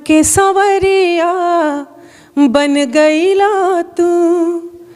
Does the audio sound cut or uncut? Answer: uncut